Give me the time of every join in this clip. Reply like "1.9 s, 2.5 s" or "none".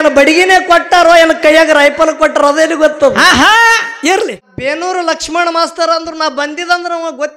4.5 s